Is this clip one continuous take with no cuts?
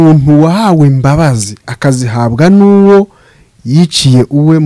yes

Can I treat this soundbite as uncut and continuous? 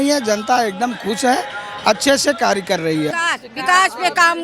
no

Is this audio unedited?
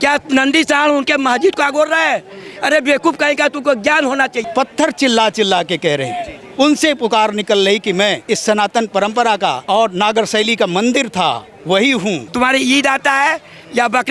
no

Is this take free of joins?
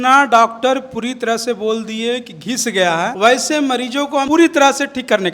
no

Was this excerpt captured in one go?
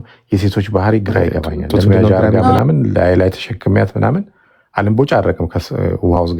no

